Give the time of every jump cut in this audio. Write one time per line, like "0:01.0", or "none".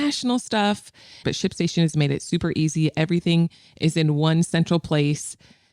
0:01.2